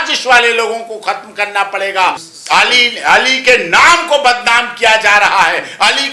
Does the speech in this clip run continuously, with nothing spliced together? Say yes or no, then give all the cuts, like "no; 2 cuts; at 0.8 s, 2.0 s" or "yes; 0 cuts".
no; 1 cut; at 2.2 s